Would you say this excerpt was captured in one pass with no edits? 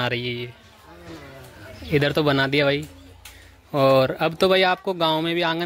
yes; 0 cuts

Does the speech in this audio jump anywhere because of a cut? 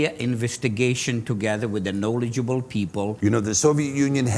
yes; 1 cut; at 3.1 s

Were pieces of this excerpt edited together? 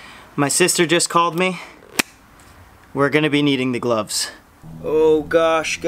yes; 1 cut; at 4.3 s

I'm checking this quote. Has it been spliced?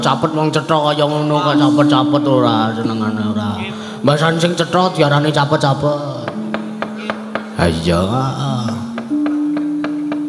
no; 0 cuts

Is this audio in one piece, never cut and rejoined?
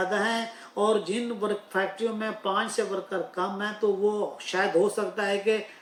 yes; 0 cuts

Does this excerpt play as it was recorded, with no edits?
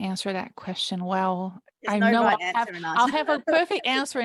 yes; 0 cuts

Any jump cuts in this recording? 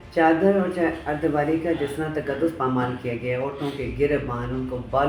no; 0 cuts

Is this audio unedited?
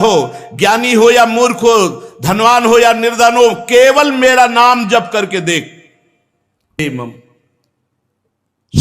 no; 1 cut; at 6.8 s

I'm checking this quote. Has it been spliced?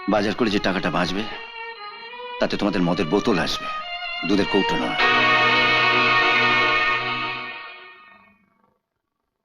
no; 0 cuts

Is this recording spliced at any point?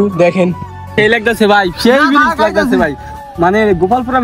yes; 1 cut; at 1.0 s

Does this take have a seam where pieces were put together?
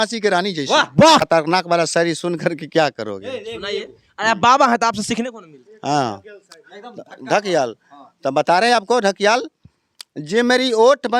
yes; 1 cut; at 1.2 s

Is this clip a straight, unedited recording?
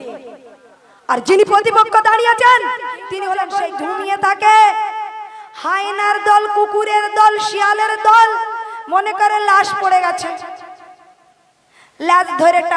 no; 1 cut; at 3.6 s

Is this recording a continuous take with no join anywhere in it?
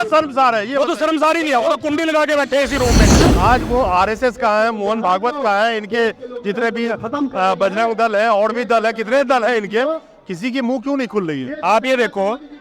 no; 1 cut; at 3.3 s

